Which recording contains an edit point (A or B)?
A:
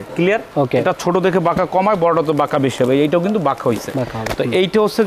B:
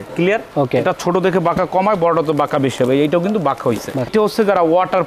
B